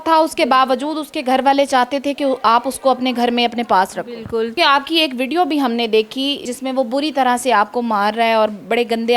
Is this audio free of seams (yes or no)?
no